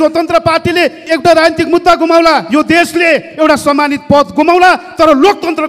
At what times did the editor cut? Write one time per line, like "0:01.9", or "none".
0:01.0